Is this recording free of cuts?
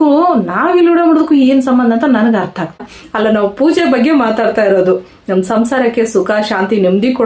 no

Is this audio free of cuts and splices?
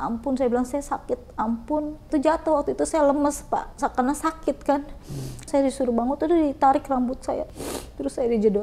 no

